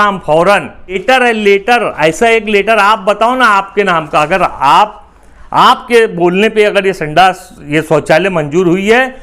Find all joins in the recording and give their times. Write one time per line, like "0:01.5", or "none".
0:01.0